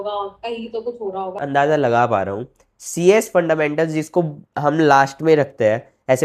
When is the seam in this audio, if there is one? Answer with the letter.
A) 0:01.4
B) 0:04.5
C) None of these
A